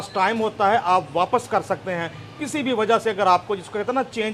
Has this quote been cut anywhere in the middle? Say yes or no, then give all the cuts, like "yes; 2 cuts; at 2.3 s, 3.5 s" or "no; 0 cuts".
no; 0 cuts